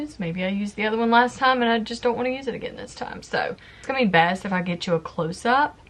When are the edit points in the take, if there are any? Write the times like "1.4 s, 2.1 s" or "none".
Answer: 3.9 s